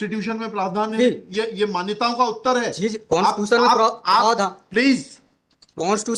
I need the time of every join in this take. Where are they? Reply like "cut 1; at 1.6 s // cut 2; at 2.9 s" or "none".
none